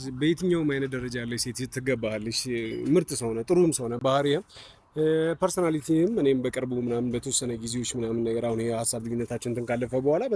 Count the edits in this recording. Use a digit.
0